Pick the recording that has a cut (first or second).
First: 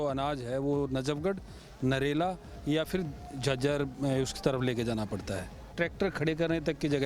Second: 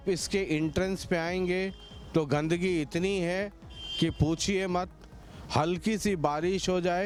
first